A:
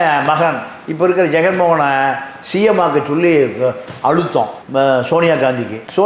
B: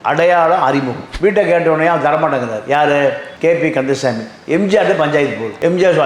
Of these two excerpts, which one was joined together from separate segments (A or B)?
B